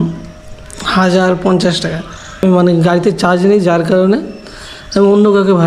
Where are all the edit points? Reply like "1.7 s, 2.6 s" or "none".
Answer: 2.4 s

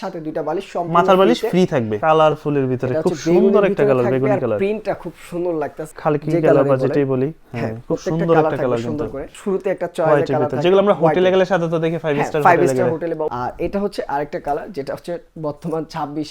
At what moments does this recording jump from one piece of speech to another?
1.9 s, 5.9 s, 9.3 s, 13.3 s

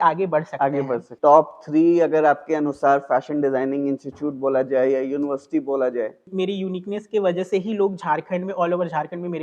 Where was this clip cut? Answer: 1.1 s, 6.2 s

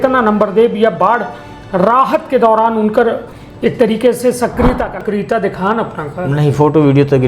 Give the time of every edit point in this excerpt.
5.0 s

